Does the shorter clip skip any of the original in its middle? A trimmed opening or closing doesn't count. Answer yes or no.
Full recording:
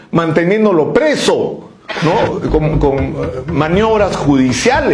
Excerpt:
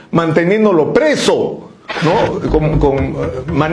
no